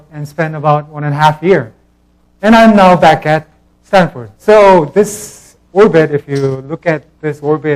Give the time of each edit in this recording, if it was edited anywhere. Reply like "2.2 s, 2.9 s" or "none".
2.5 s